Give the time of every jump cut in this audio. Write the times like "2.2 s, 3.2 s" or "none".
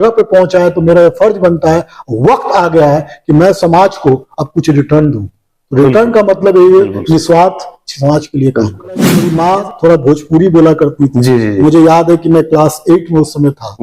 9.3 s